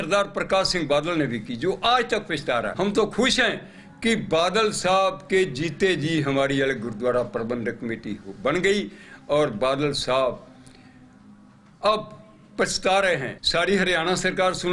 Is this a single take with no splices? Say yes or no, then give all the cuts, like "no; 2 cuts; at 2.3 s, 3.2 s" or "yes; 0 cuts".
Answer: no; 2 cuts; at 2.7 s, 13.4 s